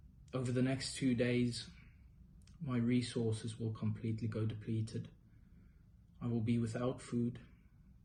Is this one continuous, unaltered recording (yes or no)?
yes